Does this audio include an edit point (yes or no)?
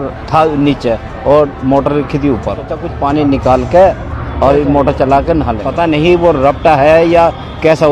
yes